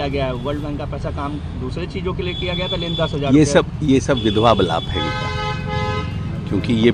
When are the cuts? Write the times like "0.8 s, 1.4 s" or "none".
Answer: none

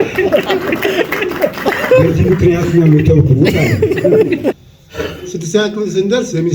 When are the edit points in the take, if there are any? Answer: 4.7 s

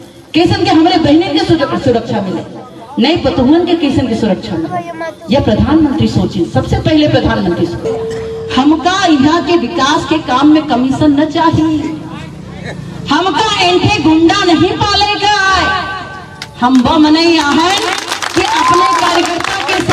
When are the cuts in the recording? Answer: 7.8 s

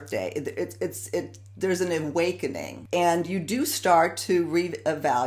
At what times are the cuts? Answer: 2.7 s

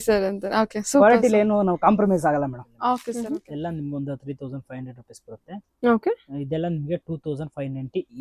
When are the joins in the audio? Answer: 3.3 s

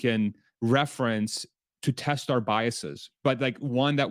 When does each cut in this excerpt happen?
none

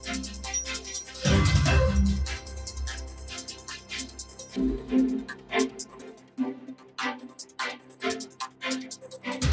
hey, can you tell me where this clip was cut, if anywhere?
none

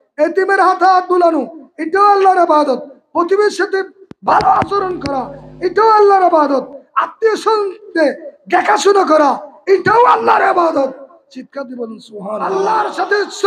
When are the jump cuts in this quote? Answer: 12.5 s

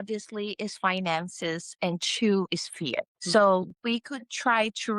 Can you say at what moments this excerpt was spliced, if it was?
3.2 s, 3.7 s

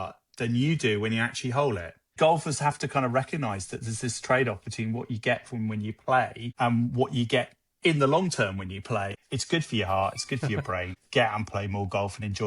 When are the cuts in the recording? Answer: 2.1 s, 6.4 s, 9.2 s, 11.0 s

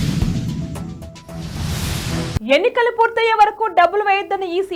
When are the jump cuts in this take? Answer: none

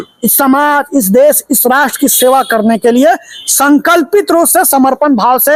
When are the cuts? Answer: none

